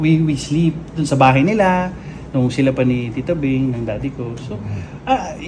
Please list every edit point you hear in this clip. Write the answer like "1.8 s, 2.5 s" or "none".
none